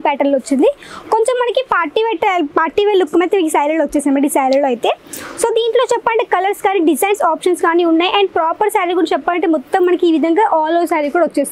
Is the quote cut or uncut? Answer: uncut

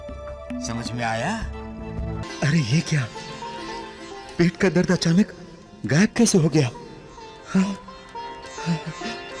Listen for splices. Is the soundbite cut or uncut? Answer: cut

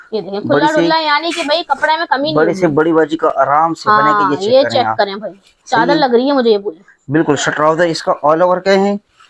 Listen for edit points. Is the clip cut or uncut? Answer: uncut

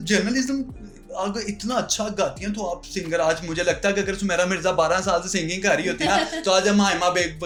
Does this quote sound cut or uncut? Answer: uncut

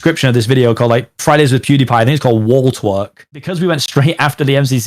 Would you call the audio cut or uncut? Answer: cut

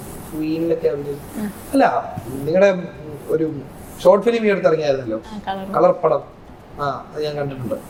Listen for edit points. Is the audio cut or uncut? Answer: uncut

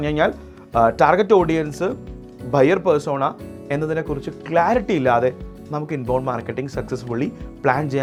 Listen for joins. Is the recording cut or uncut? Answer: uncut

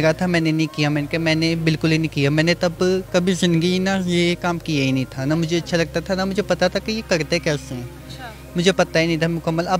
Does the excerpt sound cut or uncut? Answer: uncut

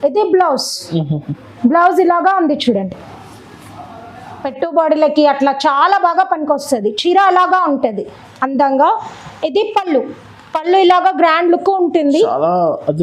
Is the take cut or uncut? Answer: cut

